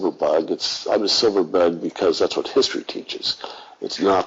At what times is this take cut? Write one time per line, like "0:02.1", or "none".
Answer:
none